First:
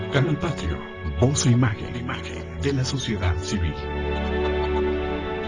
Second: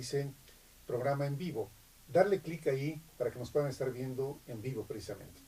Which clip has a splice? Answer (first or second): second